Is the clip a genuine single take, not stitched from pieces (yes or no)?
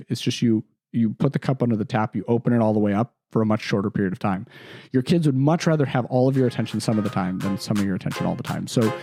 yes